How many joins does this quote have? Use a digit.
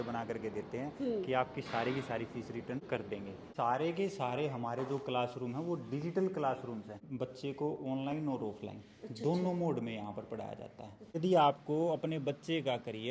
3